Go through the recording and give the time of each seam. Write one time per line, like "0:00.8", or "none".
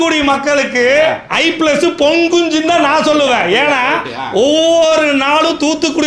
none